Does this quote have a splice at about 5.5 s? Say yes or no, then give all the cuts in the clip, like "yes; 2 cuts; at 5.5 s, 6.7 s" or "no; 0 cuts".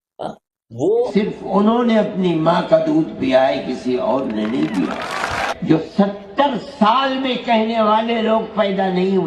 yes; 2 cuts; at 1.1 s, 5.5 s